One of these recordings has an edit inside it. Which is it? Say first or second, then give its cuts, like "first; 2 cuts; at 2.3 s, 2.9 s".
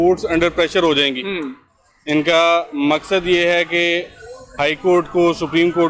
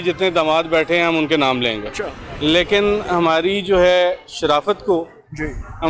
second; 1 cut; at 2.2 s